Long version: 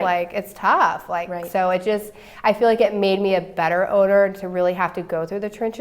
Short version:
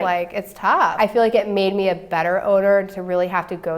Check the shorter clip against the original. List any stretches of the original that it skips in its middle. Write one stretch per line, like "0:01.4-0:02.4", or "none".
0:00.9-0:02.4